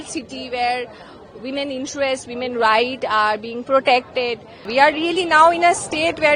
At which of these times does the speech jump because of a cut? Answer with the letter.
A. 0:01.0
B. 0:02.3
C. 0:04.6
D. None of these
C